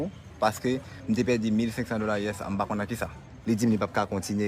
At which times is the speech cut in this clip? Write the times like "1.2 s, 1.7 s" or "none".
3.3 s